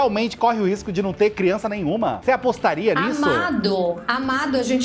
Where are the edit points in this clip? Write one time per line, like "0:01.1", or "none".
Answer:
0:02.2